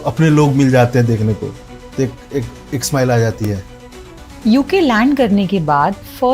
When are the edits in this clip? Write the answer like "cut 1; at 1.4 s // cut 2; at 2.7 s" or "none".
cut 1; at 4.2 s